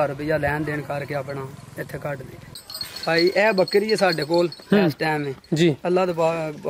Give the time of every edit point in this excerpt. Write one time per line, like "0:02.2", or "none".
0:02.5